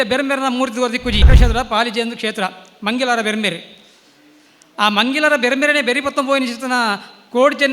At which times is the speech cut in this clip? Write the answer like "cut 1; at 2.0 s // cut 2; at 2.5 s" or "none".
cut 1; at 1.3 s